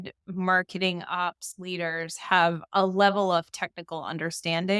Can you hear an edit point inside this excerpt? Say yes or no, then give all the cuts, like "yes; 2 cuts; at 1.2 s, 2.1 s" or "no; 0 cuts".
no; 0 cuts